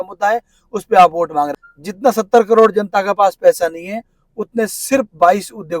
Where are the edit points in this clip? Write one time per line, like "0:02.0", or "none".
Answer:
0:01.6